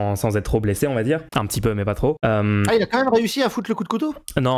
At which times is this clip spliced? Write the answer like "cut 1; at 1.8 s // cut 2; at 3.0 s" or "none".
cut 1; at 1.3 s // cut 2; at 2.2 s